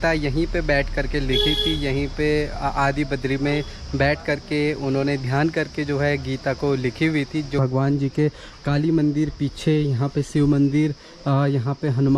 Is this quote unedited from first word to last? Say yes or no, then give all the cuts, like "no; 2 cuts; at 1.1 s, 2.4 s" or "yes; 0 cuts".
no; 1 cut; at 7.6 s